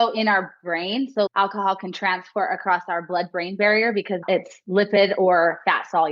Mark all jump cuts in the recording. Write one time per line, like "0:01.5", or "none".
0:01.3
0:04.2